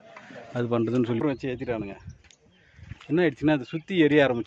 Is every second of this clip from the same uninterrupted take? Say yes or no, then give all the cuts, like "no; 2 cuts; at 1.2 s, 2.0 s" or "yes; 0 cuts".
no; 1 cut; at 1.2 s